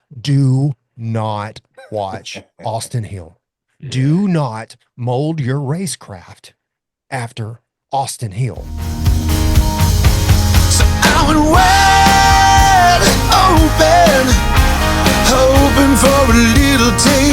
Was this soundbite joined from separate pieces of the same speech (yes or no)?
yes